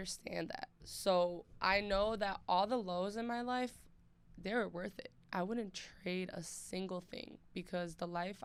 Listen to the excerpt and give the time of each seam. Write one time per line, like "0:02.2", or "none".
none